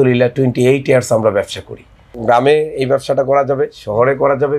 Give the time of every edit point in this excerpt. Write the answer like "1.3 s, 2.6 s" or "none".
2.2 s